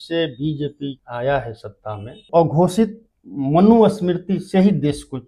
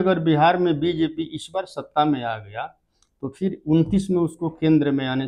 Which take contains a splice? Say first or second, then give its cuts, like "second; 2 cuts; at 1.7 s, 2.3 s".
first; 2 cuts; at 1.0 s, 2.3 s